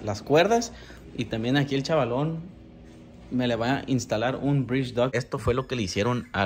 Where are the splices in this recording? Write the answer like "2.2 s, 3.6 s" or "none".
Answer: 5.1 s